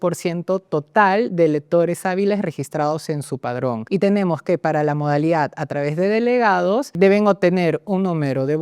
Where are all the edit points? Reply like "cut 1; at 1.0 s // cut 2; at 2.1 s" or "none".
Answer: cut 1; at 3.8 s // cut 2; at 7.0 s